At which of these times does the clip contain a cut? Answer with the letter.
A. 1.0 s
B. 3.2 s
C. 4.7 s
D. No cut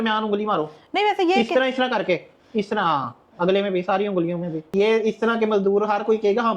C